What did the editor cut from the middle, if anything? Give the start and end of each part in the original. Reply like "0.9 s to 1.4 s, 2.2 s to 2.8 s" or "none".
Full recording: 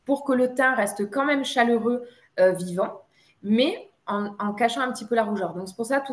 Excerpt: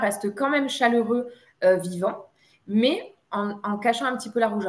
none